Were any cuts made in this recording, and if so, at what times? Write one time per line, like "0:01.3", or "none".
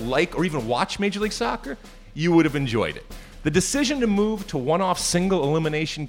none